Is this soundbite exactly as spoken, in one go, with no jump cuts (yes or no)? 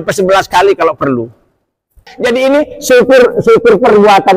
no